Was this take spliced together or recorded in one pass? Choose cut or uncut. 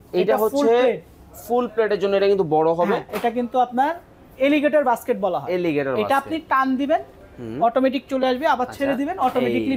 cut